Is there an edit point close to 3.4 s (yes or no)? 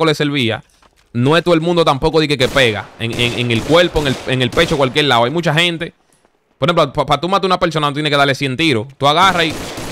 no